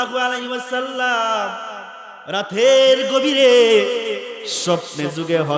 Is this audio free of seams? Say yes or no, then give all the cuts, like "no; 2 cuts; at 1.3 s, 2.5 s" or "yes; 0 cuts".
yes; 0 cuts